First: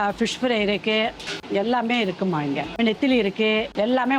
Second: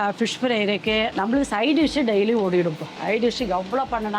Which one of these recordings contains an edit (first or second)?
second